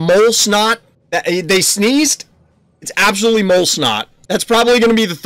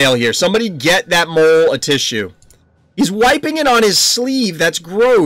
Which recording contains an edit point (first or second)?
first